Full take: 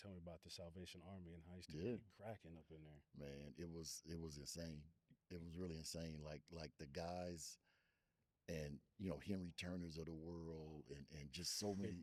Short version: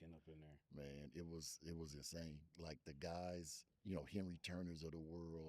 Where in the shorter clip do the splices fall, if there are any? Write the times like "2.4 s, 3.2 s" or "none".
2.5 s, 3.7 s